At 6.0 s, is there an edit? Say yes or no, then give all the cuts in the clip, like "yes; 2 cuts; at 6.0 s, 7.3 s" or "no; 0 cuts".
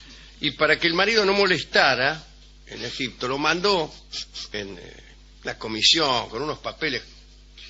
yes; 1 cut; at 6.0 s